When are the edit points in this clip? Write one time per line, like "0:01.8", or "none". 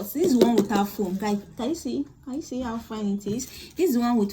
none